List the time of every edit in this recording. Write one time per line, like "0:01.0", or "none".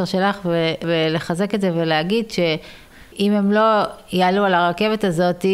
0:00.8
0:02.9